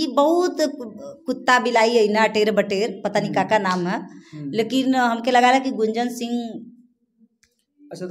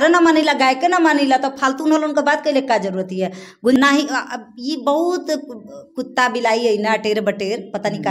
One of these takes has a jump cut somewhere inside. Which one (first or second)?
second